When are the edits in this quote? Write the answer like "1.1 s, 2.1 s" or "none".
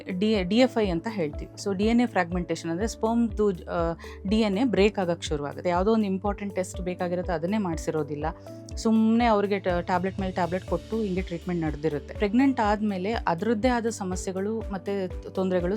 5.6 s, 12.1 s